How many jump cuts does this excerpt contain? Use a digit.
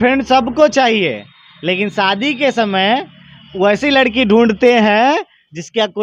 0